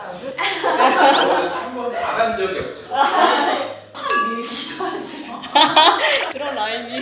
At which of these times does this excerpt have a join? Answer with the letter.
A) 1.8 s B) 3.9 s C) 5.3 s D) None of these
B